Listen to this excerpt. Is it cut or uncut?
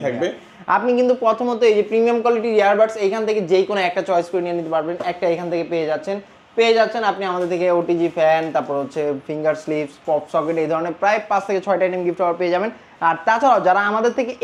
uncut